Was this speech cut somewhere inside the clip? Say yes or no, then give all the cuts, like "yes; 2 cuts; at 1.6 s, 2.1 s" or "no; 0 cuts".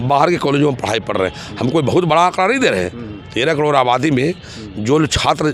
no; 0 cuts